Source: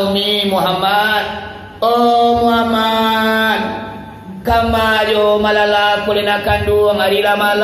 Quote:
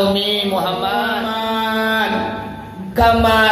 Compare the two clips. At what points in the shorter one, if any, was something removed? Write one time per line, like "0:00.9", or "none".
0:01.1